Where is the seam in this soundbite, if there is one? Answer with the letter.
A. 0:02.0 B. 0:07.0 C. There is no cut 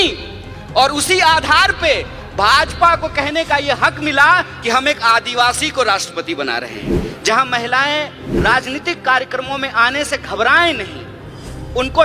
B